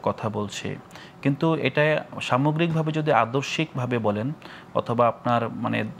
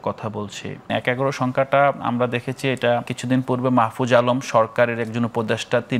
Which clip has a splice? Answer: second; 2 cuts; at 0.9 s, 3.1 s

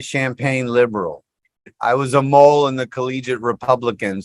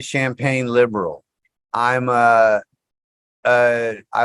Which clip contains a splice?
first; 1 cut; at 1.6 s

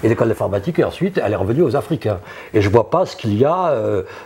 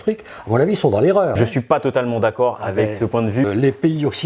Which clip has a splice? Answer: second; 2 cuts; at 1.3 s, 3.5 s

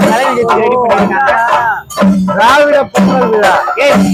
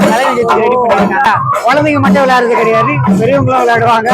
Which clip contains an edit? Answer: second; 1 cut; at 1.3 s

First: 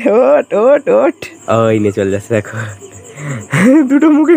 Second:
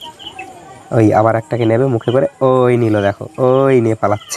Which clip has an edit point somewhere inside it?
first; 1 cut; at 1.3 s

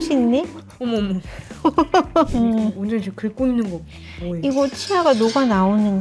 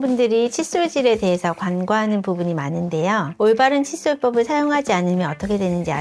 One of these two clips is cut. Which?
first; 1 cut; at 2.3 s

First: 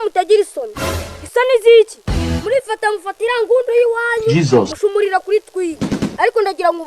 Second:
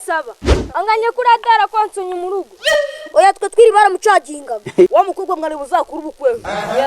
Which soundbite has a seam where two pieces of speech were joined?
second; 1 cut; at 4.9 s

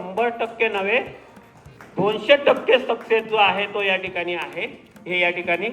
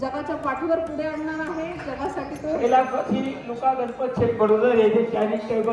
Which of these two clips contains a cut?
second; 2 cuts; at 1.8 s, 2.6 s

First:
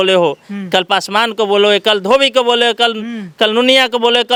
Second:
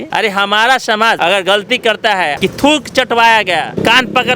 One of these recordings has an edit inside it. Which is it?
second; 2 cuts; at 1.2 s, 2.3 s

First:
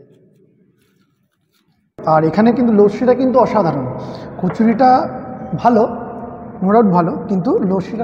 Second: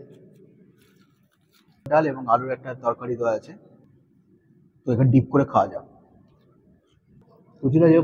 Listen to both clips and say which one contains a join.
first; 1 cut; at 1.9 s

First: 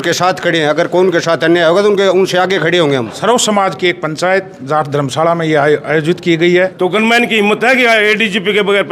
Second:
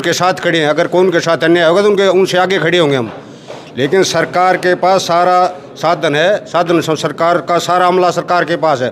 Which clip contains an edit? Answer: first; 2 cuts; at 3.1 s, 6.7 s

